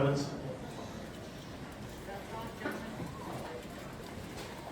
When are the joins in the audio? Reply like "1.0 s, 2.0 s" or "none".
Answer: none